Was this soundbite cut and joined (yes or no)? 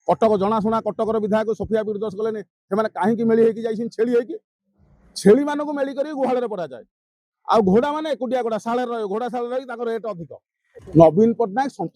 yes